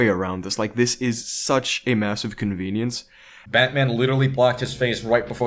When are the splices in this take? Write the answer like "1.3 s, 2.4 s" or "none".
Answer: 3.5 s